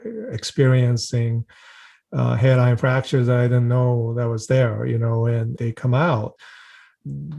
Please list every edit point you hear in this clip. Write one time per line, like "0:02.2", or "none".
0:06.4